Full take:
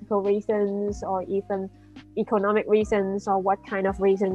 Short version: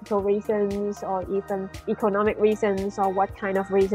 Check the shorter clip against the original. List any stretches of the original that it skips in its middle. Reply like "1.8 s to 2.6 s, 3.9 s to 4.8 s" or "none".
1.7 s to 2.0 s